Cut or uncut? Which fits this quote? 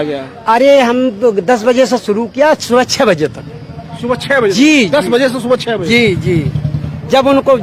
uncut